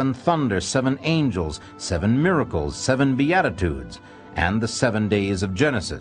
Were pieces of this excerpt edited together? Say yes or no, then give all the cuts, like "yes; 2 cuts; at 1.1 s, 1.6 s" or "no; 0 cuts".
no; 0 cuts